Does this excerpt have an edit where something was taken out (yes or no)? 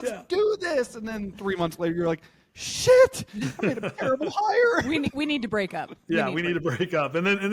no